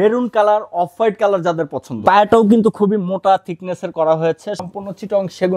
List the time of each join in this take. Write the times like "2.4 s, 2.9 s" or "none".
1.8 s, 4.7 s